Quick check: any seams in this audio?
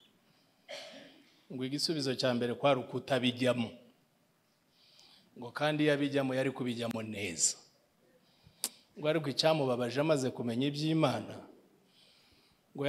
no; 0 cuts

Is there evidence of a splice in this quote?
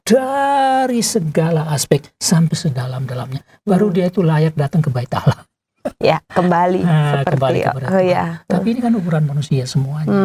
no; 0 cuts

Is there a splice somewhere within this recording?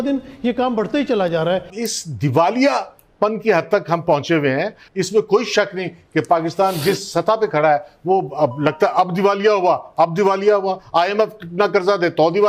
yes; 2 cuts; at 1.7 s, 4.8 s

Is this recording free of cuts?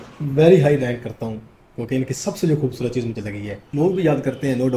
no; 1 cut; at 3.6 s

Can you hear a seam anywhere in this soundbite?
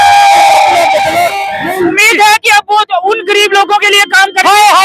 yes; 1 cut; at 1.9 s

